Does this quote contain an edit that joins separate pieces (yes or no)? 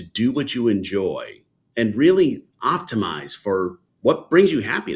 yes